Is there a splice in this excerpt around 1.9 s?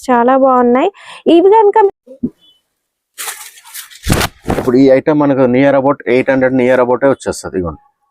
yes; 1 cut; at 1.9 s

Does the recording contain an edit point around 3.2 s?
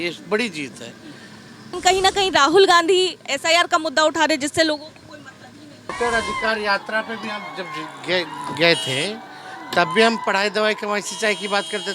no; 2 cuts; at 1.7 s, 5.9 s

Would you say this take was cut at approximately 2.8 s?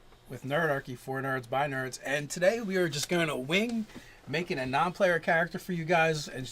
yes; 1 cut; at 2.8 s

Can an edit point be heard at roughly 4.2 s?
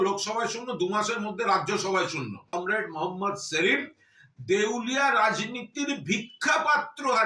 no; 1 cut; at 2.5 s

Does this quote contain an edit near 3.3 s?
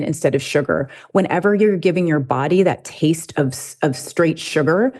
no; 1 cut; at 1.0 s

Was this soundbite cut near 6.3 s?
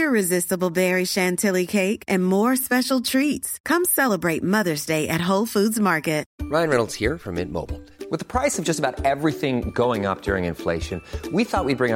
yes; 1 cut; at 6.3 s

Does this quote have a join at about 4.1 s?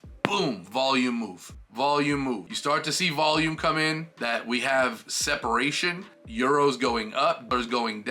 yes; 2 cuts; at 2.5 s, 4.1 s

